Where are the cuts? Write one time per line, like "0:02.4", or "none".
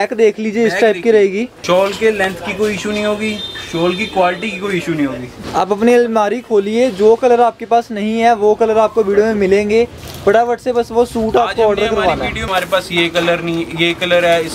0:01.5
0:05.3
0:12.5